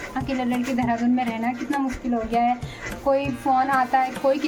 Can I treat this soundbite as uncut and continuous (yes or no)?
yes